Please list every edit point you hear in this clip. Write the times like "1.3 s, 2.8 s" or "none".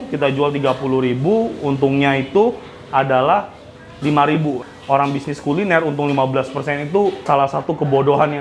4.6 s